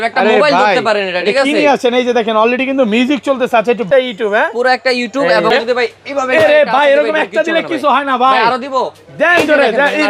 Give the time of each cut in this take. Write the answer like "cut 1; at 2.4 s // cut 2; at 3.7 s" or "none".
cut 1; at 3.8 s // cut 2; at 5.5 s